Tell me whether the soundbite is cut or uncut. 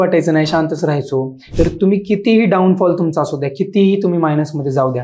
cut